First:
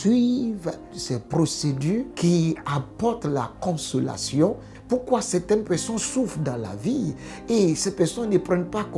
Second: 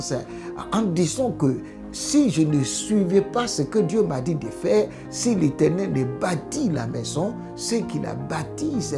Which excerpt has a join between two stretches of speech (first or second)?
first